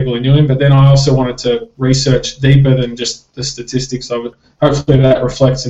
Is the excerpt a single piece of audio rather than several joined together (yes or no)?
no